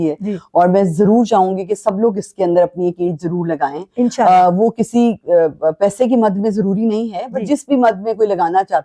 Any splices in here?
no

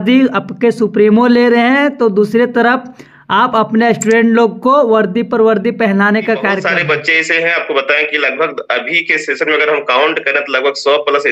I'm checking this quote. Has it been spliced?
yes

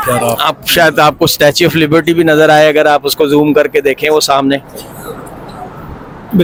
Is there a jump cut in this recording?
no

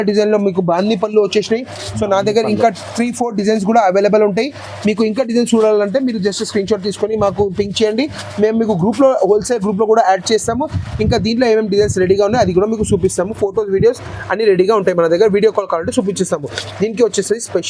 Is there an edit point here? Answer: no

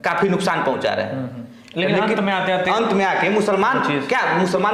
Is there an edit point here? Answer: no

